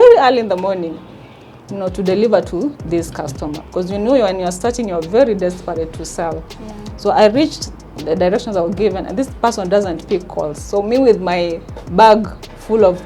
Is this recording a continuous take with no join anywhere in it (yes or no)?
yes